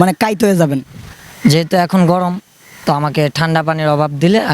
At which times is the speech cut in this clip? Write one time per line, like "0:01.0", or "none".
none